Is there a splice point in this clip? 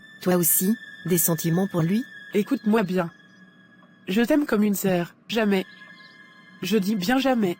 yes; 2 cuts; at 2.2 s, 5.2 s

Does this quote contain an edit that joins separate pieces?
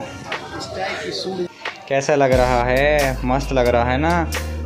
yes; 1 cut; at 1.4 s

